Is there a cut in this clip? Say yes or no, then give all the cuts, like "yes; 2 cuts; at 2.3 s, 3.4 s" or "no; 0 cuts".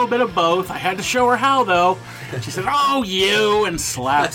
no; 0 cuts